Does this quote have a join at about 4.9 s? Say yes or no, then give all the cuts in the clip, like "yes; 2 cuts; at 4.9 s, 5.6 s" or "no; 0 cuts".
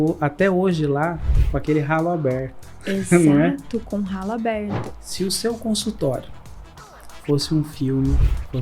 yes; 1 cut; at 4.9 s